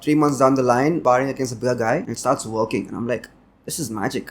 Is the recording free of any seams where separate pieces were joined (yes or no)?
no